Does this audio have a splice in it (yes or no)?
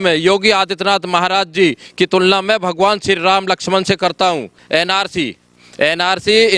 yes